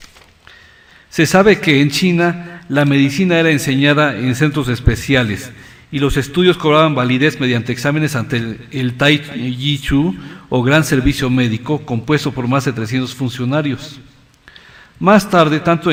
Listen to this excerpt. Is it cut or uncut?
uncut